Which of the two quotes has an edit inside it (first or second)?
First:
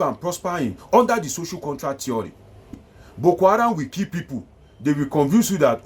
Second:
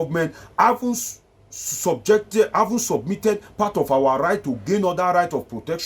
first